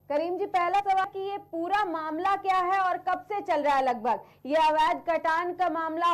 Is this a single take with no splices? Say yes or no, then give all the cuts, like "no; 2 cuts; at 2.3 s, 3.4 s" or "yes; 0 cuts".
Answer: no; 1 cut; at 0.9 s